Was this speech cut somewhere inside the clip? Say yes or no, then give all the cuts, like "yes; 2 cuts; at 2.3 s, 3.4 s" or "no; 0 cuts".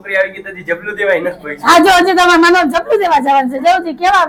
no; 0 cuts